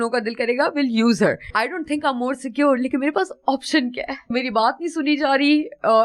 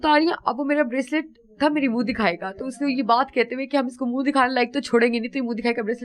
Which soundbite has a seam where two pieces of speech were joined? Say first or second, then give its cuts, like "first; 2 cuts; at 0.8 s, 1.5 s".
first; 2 cuts; at 1.4 s, 4.2 s